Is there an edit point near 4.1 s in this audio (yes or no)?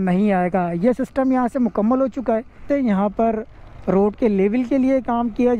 no